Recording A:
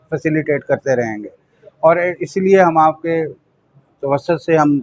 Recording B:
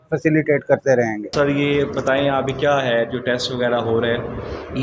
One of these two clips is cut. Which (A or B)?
B